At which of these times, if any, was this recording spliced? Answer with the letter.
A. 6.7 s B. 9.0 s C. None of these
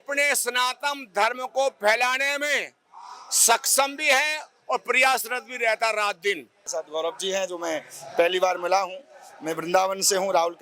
A